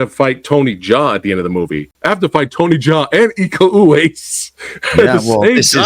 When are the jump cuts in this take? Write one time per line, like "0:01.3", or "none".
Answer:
0:01.9

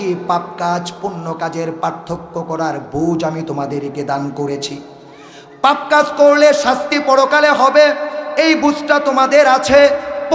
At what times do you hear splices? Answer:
none

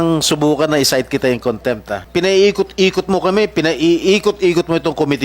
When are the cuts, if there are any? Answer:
0:01.9

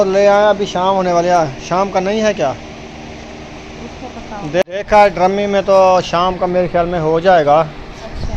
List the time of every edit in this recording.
0:04.6

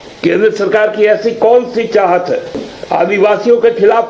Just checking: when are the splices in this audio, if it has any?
0:02.7

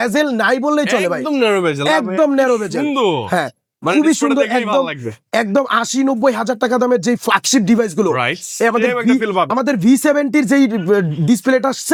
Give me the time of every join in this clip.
none

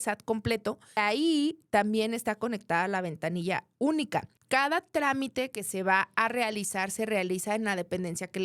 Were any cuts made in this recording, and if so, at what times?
0:01.0
0:04.4

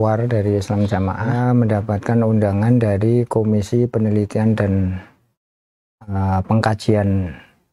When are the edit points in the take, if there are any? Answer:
0:01.3

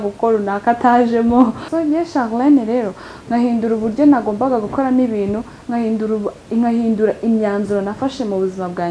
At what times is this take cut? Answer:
0:01.6

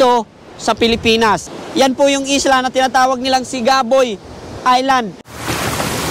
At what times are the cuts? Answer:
0:01.6
0:05.2

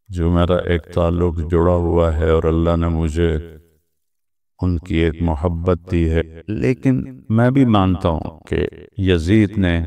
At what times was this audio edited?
0:06.2

